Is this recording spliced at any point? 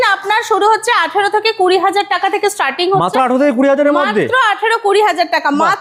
no; 0 cuts

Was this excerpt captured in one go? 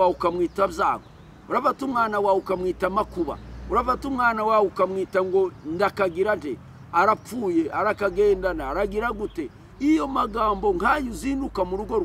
yes; 0 cuts

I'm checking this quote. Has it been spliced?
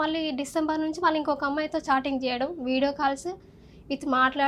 no; 0 cuts

